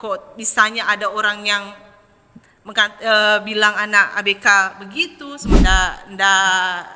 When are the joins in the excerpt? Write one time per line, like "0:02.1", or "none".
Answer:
0:05.6